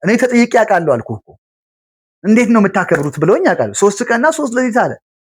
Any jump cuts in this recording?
no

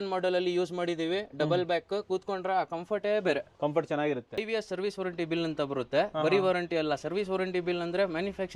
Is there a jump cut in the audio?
yes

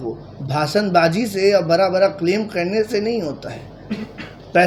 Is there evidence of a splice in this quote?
no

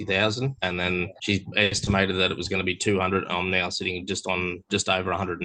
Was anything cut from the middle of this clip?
no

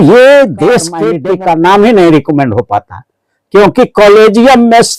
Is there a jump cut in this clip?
yes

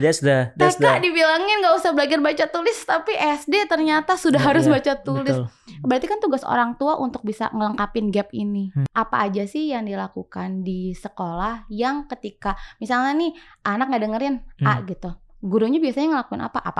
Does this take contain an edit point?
yes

